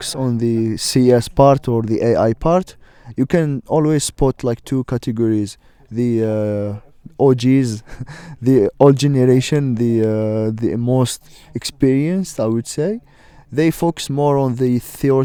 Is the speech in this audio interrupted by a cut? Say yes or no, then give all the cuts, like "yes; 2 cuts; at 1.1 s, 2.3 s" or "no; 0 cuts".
no; 0 cuts